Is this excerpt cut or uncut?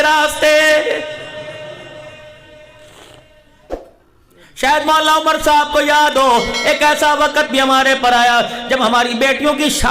cut